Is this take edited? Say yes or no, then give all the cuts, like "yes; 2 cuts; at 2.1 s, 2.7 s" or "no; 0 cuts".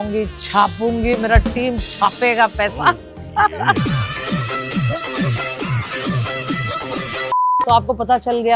no; 0 cuts